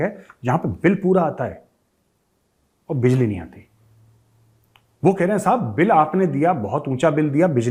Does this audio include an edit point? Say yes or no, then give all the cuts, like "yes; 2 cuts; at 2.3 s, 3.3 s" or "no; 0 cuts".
no; 0 cuts